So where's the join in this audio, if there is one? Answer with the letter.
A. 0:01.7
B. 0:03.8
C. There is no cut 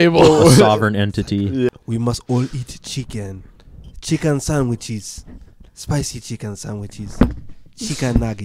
A